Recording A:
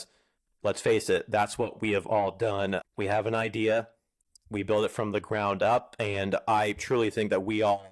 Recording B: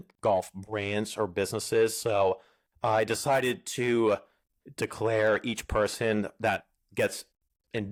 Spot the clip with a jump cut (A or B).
A